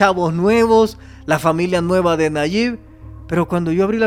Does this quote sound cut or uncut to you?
uncut